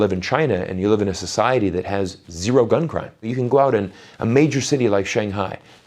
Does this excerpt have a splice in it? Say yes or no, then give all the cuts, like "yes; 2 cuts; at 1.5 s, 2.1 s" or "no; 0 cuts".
yes; 1 cut; at 3.3 s